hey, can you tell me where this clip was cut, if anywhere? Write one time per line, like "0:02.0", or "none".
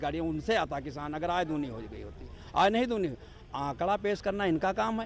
none